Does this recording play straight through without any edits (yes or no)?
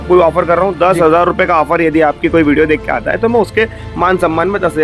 yes